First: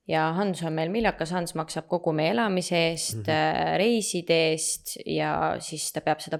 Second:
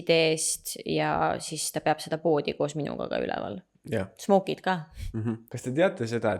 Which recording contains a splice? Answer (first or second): second